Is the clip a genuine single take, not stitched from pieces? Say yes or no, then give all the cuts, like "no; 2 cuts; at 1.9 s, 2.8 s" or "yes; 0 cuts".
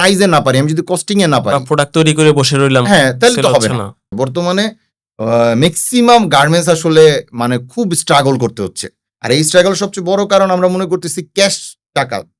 no; 1 cut; at 4.1 s